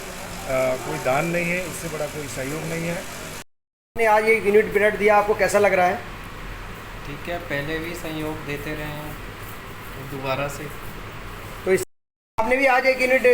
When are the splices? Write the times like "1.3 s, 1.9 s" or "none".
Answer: 3.4 s, 11.8 s